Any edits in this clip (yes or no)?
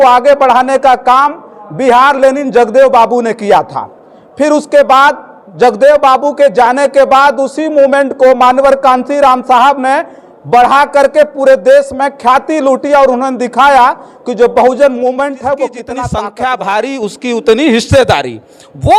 yes